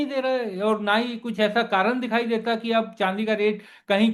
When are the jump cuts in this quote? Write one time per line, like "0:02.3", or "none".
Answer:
none